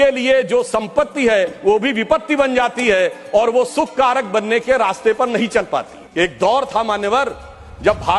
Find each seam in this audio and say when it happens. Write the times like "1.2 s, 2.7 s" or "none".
6.0 s